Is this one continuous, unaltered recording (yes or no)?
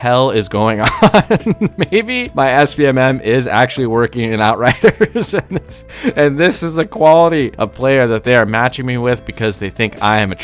no